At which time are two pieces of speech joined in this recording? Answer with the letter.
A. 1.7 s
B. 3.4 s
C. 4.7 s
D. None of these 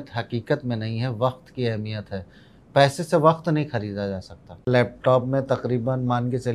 C